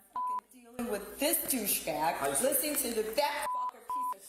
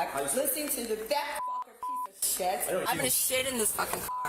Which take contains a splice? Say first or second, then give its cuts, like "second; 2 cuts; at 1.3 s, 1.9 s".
second; 1 cut; at 3.1 s